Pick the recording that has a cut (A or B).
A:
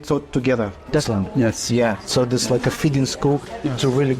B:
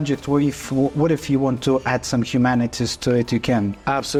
A